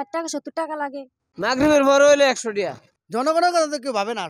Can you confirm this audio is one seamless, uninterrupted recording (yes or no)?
no